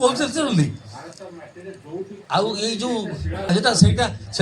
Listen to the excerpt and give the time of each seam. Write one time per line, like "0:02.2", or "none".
0:02.2
0:03.5